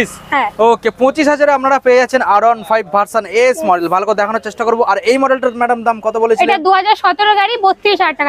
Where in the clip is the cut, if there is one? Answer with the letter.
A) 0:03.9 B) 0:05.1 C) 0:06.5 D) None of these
D